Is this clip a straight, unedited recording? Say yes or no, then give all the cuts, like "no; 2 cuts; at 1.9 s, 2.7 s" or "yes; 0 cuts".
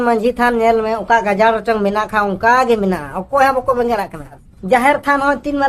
no; 1 cut; at 4.5 s